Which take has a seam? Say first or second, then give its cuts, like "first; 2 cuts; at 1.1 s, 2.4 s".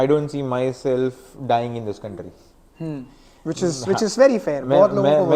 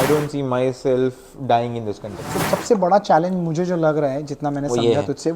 second; 1 cut; at 2.3 s